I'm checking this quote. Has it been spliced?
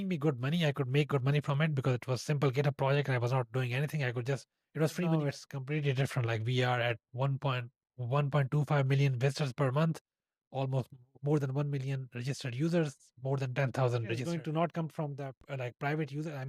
yes; 2 cuts; at 5.1 s, 14.2 s

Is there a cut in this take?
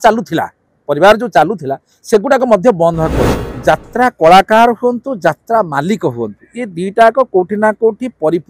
yes; 1 cut; at 3.5 s

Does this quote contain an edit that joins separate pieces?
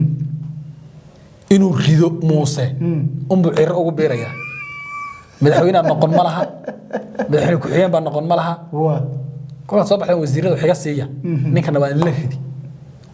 no; 0 cuts

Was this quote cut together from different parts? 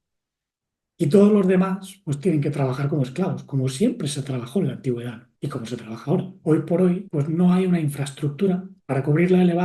yes; 4 cuts; at 5.2 s, 6.3 s, 7.1 s, 8.7 s

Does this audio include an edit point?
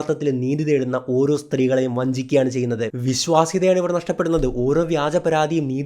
yes; 1 cut; at 2.9 s

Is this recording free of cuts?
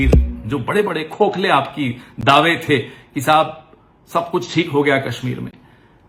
yes; 0 cuts

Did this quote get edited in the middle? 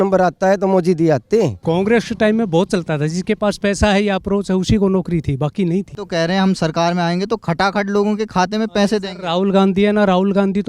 yes; 2 cuts; at 1.6 s, 6.0 s

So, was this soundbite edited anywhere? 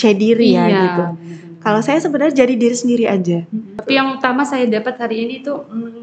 yes; 1 cut; at 3.7 s

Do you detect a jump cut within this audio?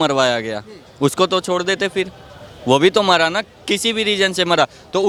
no; 0 cuts

